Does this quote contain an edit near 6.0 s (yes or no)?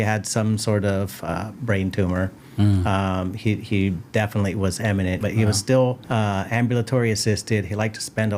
yes